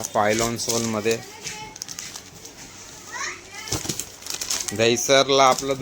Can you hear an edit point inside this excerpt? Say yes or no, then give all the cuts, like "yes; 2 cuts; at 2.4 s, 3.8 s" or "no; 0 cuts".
no; 0 cuts